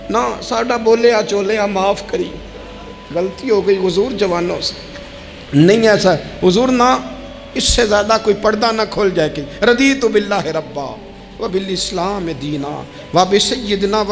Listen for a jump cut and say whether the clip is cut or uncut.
uncut